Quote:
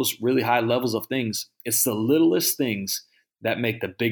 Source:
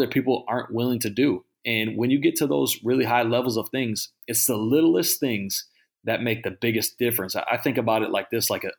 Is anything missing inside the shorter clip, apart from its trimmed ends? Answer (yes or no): no